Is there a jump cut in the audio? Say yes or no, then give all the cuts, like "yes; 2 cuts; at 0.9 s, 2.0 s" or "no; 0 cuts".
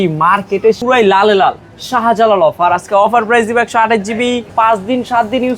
yes; 2 cuts; at 0.8 s, 4.5 s